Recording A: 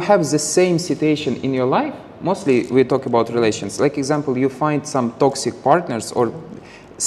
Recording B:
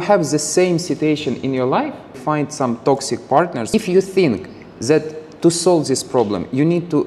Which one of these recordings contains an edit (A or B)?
B